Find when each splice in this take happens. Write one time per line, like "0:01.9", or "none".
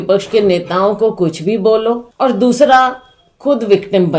0:02.1